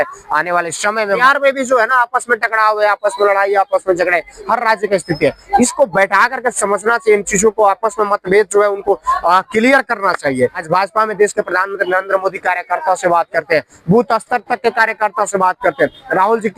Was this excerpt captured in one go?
no; 2 cuts; at 1.2 s, 10.6 s

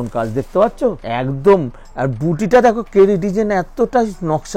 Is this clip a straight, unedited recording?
no; 1 cut; at 1.0 s

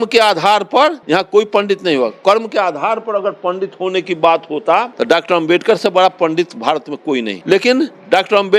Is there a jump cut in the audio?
yes; 3 cuts; at 1.0 s, 4.9 s, 7.4 s

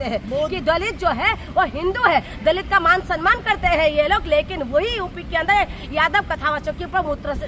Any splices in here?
no; 0 cuts

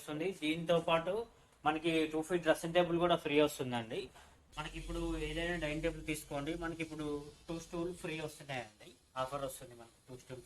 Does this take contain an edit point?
yes; 1 cut; at 4.5 s

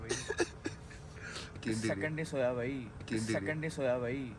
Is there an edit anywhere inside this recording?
no; 0 cuts

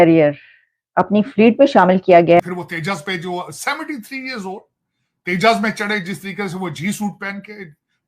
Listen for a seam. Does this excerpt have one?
yes; 1 cut; at 2.4 s

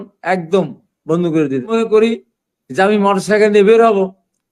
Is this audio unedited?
no; 1 cut; at 1.7 s

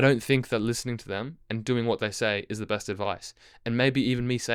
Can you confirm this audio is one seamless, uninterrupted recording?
yes; 0 cuts

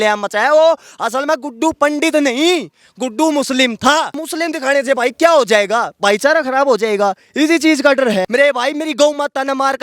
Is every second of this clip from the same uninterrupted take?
no; 2 cuts; at 4.2 s, 8.3 s

